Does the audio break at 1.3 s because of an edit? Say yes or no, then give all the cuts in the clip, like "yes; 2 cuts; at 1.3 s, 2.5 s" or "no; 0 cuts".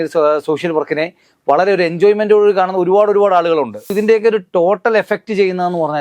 no; 1 cut; at 3.9 s